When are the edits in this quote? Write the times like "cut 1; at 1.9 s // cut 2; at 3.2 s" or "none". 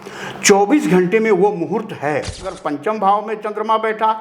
cut 1; at 2.4 s